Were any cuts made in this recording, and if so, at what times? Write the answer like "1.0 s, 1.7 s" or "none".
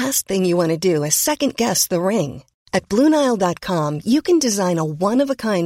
none